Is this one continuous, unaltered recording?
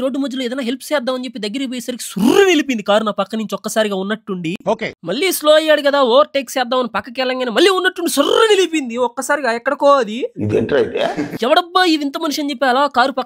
yes; 0 cuts

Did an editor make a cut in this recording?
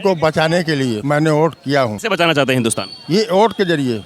yes; 2 cuts; at 1.0 s, 2.0 s

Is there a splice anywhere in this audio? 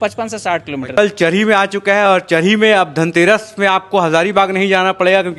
yes; 1 cut; at 0.9 s

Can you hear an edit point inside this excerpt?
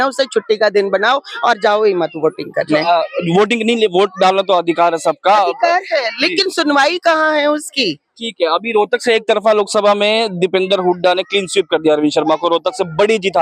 no; 0 cuts

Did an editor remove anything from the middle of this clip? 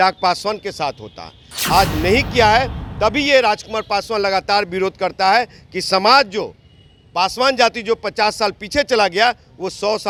no; 0 cuts

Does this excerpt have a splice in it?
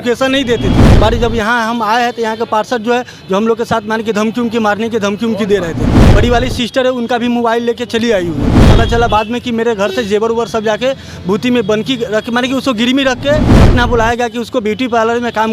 yes; 4 cuts; at 0.8 s, 6.1 s, 8.6 s, 13.6 s

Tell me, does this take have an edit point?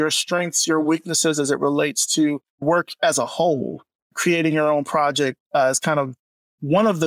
yes; 2 cuts; at 2.5 s, 4.1 s

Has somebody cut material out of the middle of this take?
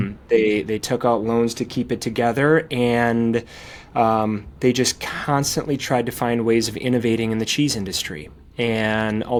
no; 0 cuts

